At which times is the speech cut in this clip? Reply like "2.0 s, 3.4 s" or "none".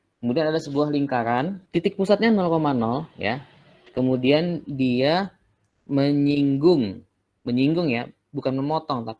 1.6 s